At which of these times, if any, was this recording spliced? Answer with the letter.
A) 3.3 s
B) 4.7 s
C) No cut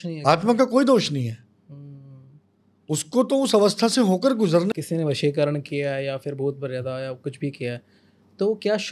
B